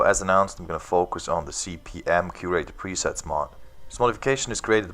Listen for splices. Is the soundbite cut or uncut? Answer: cut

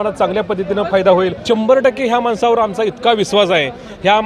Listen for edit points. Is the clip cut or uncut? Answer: cut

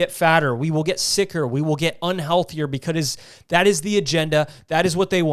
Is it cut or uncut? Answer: uncut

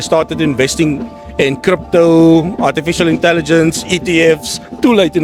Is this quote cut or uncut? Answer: uncut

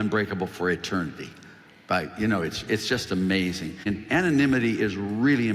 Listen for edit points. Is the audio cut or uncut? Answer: cut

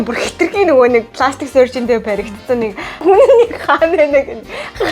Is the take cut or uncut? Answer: cut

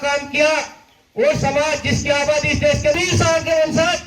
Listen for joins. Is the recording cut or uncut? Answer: cut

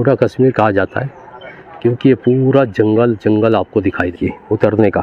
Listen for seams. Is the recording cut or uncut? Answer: cut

